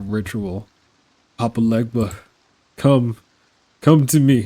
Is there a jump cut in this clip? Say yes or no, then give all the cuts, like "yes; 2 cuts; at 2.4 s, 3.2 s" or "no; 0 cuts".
no; 0 cuts